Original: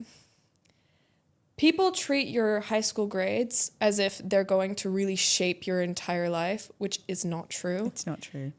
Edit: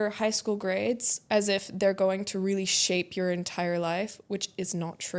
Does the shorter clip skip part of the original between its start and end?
no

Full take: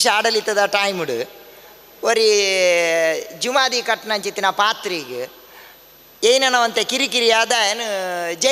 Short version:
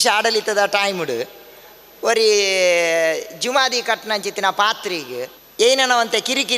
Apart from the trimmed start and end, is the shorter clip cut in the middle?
yes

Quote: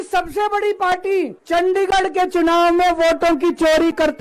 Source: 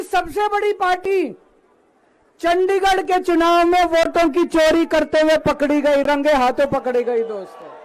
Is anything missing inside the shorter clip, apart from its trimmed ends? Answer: yes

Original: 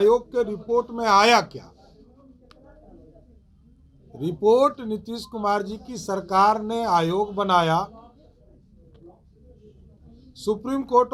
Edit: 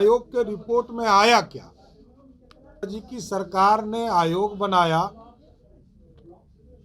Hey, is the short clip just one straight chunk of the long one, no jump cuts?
no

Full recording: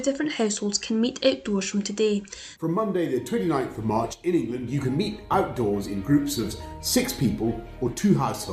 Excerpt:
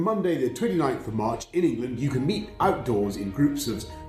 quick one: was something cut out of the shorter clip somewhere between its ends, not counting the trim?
no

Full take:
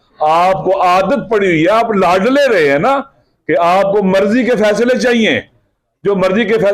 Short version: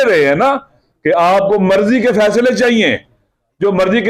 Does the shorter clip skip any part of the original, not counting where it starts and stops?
no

